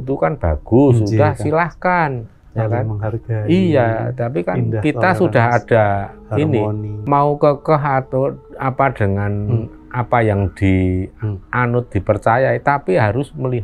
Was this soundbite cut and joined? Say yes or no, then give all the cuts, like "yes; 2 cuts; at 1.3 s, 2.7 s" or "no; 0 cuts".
no; 0 cuts